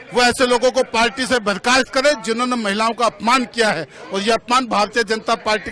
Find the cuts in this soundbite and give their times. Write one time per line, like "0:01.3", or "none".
none